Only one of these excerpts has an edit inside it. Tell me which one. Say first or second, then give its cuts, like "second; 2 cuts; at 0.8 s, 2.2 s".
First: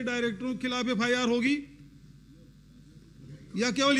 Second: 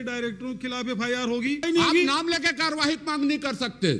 second; 1 cut; at 1.6 s